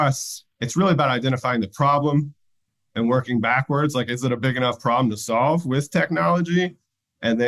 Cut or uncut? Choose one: uncut